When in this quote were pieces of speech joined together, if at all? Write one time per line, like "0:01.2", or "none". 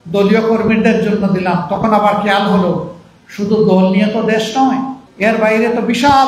0:05.0